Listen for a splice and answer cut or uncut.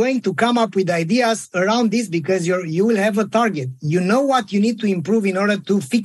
uncut